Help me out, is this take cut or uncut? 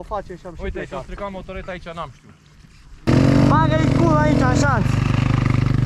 cut